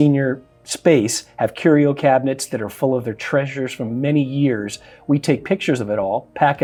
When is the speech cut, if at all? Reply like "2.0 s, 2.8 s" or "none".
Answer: none